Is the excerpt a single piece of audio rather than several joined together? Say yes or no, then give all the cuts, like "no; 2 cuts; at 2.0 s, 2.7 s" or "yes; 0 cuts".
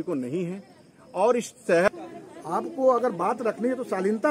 no; 1 cut; at 1.9 s